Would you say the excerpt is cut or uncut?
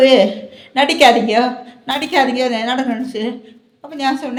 uncut